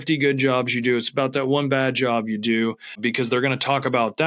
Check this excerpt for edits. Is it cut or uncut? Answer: cut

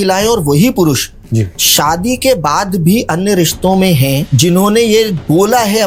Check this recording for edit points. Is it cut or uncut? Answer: uncut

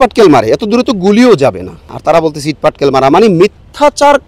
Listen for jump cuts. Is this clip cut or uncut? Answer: cut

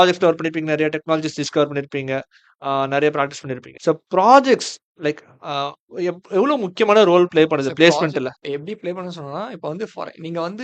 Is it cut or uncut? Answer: uncut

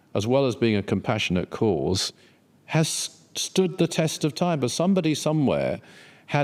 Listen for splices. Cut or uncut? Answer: uncut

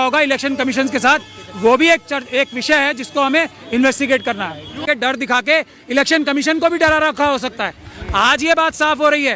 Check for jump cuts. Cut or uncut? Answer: cut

